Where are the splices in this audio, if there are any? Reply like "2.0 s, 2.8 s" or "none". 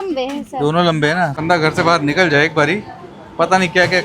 1.3 s